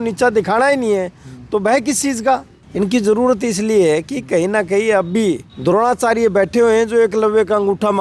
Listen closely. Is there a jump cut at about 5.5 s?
yes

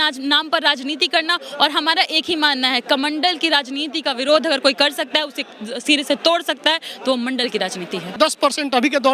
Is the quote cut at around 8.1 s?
yes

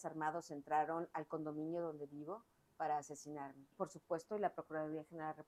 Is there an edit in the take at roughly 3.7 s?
yes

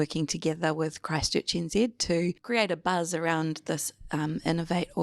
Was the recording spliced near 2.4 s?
yes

